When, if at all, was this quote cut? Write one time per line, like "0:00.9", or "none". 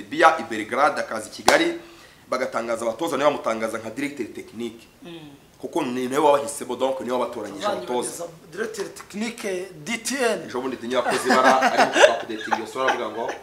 none